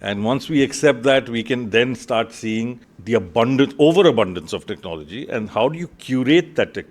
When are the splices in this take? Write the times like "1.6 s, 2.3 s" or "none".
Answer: 2.9 s